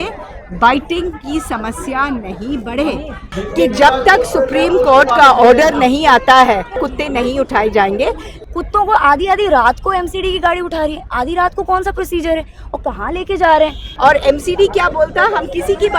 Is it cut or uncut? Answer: cut